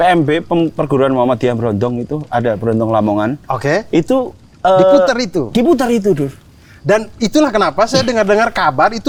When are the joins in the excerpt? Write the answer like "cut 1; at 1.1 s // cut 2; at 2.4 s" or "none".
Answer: none